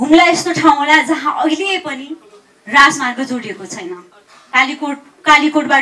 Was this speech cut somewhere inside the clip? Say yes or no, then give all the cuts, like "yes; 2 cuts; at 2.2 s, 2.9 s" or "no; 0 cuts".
no; 0 cuts